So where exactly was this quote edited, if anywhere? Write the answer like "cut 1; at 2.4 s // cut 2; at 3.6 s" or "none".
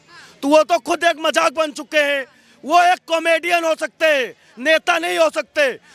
none